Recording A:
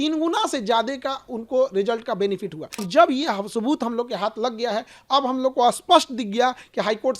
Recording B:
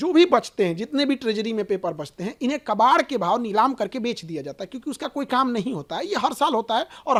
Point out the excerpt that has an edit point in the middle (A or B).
A